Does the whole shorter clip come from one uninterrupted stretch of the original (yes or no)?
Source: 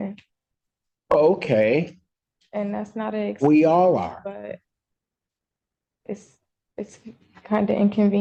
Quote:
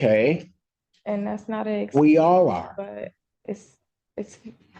no